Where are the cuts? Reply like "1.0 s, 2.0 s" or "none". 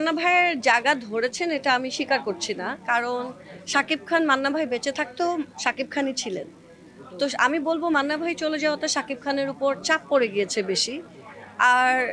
none